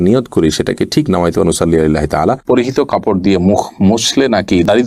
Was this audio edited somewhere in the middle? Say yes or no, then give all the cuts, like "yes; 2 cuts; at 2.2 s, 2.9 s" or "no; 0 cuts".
yes; 1 cut; at 2.4 s